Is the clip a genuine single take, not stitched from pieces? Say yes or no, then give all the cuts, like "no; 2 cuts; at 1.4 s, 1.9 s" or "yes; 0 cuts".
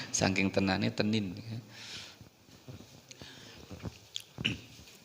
no; 1 cut; at 2.4 s